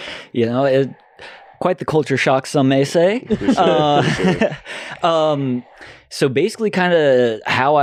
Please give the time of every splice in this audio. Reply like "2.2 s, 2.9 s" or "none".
none